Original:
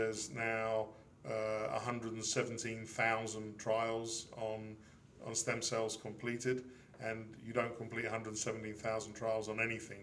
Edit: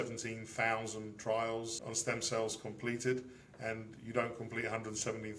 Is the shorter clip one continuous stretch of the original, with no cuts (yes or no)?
no